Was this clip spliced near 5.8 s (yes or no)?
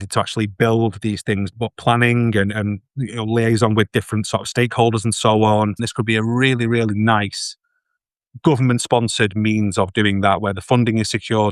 yes